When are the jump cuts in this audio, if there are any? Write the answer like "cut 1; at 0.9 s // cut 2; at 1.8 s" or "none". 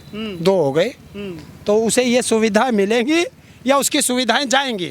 none